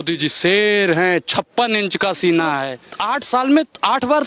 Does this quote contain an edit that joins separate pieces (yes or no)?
no